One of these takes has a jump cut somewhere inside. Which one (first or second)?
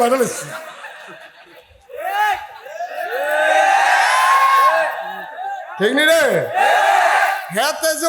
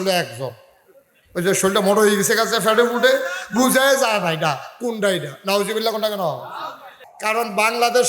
second